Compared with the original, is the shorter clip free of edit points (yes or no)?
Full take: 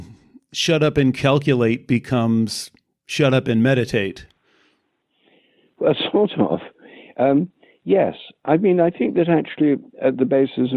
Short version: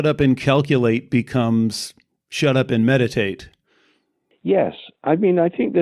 no